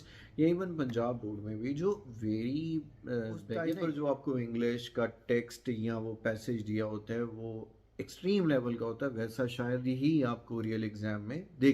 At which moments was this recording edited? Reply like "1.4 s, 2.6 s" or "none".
3.7 s